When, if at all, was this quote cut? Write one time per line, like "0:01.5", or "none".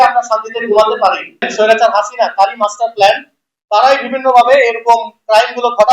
0:01.5